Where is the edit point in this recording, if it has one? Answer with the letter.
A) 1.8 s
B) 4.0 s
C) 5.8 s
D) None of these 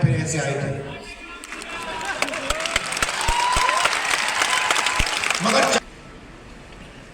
C